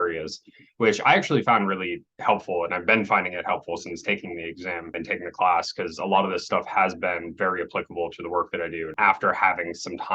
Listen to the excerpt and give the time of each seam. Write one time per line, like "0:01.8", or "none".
0:05.0
0:08.9